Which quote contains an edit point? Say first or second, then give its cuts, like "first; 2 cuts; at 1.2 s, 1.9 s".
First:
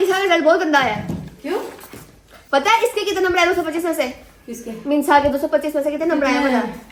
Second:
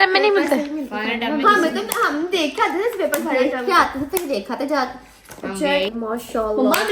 second; 1 cut; at 5.9 s